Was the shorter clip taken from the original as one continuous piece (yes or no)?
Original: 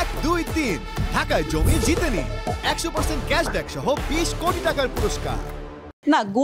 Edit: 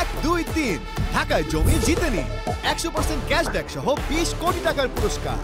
yes